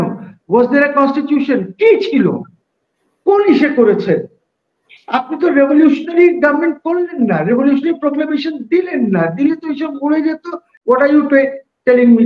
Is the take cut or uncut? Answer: cut